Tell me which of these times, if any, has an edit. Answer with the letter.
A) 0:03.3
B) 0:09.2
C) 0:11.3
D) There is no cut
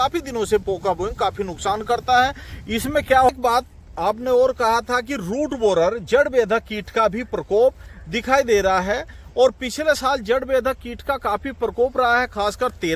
A